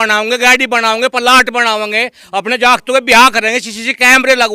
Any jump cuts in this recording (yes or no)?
no